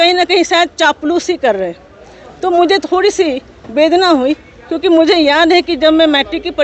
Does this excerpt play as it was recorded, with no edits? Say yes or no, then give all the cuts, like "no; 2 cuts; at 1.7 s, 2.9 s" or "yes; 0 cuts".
yes; 0 cuts